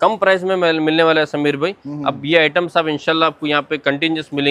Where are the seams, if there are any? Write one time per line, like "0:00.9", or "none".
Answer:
none